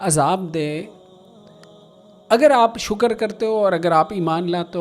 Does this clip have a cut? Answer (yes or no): no